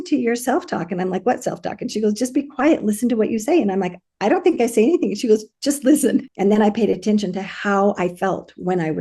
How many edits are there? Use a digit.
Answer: 1